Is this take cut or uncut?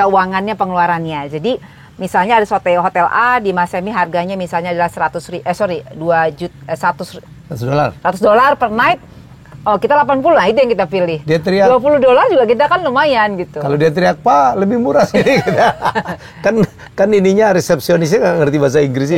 uncut